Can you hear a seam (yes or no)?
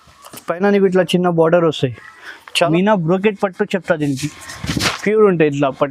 yes